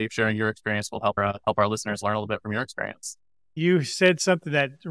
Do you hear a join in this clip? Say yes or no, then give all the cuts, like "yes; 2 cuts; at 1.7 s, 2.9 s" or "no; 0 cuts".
yes; 1 cut; at 3.5 s